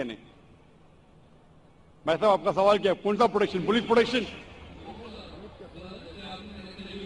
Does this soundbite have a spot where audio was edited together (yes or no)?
yes